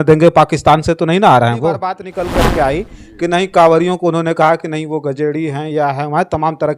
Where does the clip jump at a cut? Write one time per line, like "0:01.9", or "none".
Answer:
0:02.1